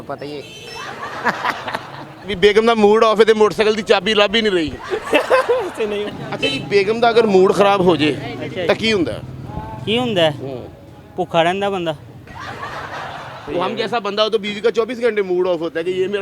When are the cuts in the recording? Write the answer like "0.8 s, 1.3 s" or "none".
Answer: 2.3 s, 6.2 s, 13.4 s